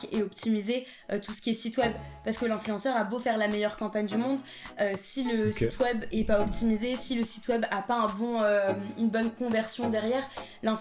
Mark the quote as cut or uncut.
uncut